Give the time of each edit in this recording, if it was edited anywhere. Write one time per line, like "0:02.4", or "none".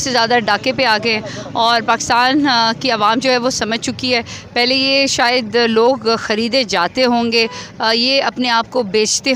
none